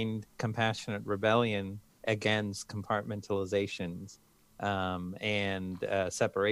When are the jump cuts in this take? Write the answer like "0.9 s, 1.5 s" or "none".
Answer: 1.8 s